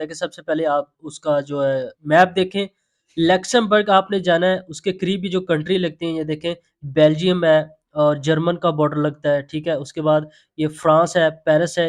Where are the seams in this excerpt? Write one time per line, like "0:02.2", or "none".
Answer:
none